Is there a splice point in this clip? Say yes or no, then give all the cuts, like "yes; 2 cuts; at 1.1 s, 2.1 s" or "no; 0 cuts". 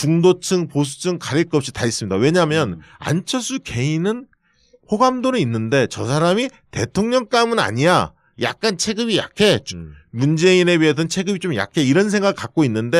yes; 1 cut; at 7.8 s